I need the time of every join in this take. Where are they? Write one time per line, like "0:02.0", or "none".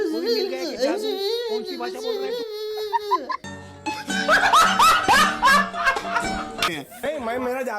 0:06.7